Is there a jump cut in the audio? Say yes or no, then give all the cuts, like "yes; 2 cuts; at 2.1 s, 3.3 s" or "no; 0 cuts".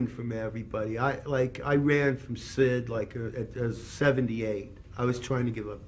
no; 0 cuts